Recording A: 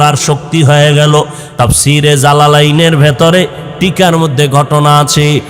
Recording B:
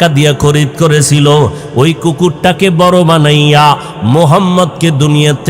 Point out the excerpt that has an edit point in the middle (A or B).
A